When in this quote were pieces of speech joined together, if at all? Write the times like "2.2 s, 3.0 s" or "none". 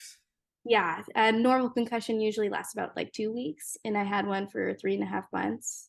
none